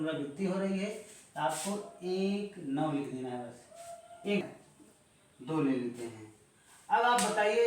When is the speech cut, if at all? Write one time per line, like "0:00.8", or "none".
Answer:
0:04.4